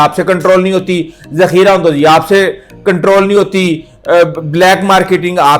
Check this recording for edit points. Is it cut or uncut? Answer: uncut